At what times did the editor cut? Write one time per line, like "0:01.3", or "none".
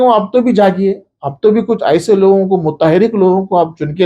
none

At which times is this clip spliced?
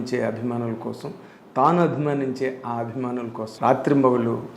0:03.5

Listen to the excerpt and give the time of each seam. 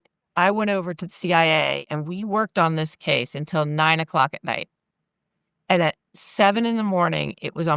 0:01.8

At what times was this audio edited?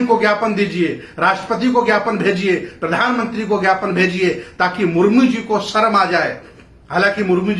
none

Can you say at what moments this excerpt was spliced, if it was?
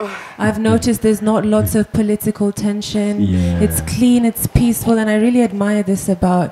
none

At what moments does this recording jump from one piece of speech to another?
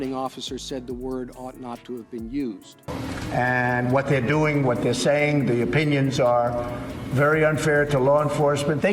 0:02.8

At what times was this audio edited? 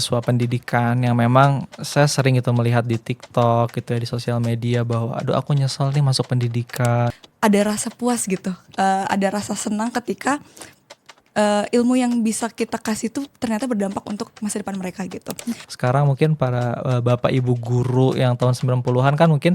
0:07.1
0:15.7

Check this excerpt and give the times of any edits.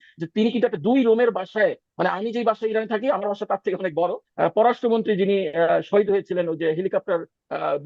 0:04.2

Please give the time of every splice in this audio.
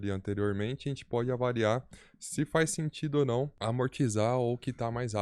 0:03.6

